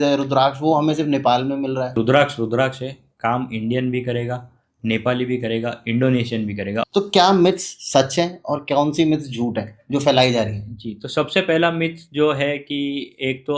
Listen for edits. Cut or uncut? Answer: cut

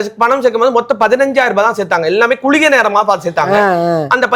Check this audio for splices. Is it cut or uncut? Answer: uncut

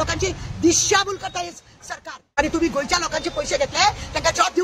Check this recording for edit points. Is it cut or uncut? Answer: cut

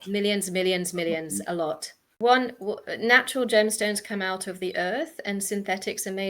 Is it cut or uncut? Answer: cut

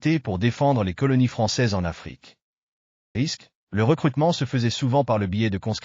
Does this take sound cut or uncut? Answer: cut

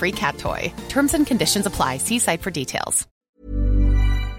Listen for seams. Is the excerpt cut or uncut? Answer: cut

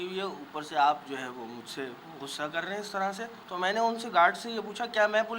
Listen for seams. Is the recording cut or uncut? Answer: cut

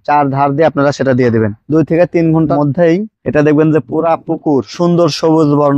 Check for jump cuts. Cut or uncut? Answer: cut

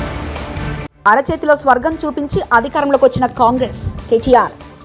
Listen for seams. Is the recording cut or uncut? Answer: uncut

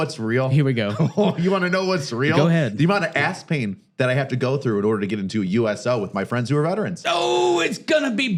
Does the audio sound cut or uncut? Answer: uncut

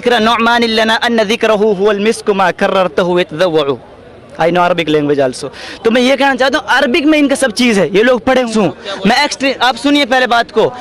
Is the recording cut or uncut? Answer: cut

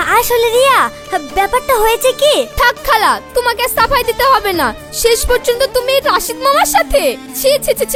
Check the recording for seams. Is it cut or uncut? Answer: uncut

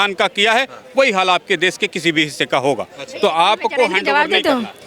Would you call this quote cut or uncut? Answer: uncut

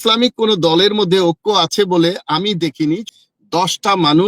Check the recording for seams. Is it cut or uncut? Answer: cut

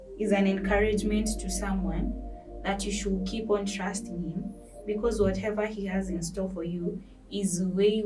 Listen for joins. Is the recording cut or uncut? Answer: uncut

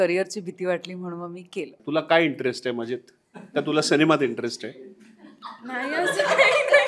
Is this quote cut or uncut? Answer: cut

